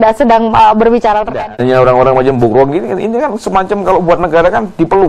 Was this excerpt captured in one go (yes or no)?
no